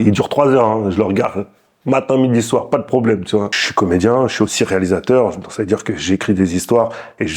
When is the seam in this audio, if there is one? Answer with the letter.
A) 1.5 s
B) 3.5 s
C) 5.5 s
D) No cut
B